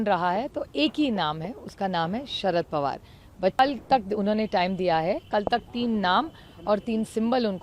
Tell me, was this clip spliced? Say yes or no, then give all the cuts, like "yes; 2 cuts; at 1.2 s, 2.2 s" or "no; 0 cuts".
yes; 1 cut; at 3.6 s